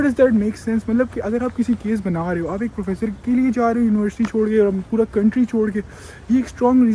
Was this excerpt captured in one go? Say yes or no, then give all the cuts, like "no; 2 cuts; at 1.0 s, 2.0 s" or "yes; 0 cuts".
yes; 0 cuts